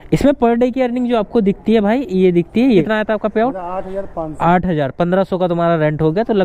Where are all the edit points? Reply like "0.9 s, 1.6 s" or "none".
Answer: 2.8 s

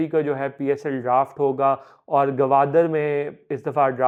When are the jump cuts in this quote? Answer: none

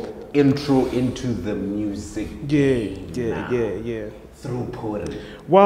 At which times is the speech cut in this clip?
none

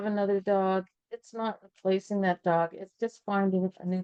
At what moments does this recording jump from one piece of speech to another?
none

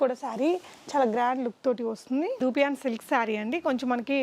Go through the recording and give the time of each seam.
2.4 s

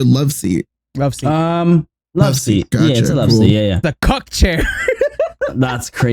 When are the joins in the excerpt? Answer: 3.8 s

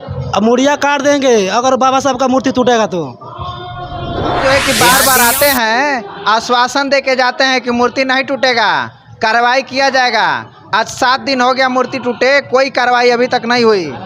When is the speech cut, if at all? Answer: 4.4 s

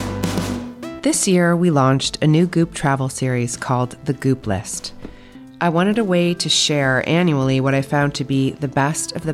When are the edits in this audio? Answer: 0.9 s

